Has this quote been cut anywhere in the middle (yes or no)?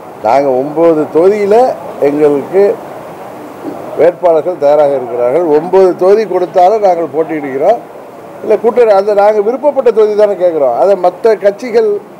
no